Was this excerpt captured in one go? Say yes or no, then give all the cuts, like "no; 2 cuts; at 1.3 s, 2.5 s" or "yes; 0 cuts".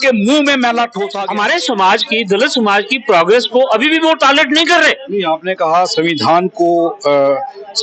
no; 1 cut; at 1.1 s